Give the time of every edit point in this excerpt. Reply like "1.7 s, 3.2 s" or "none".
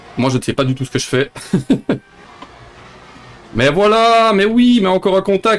2.2 s